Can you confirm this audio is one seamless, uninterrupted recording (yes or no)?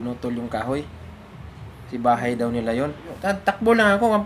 no